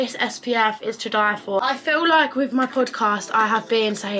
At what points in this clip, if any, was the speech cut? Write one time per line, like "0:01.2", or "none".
0:01.6